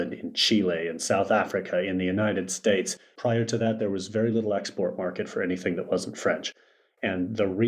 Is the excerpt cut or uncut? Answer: cut